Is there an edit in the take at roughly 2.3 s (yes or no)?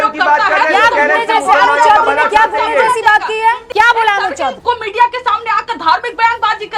no